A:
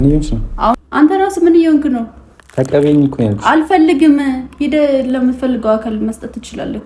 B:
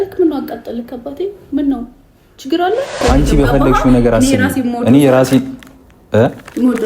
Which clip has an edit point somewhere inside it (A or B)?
B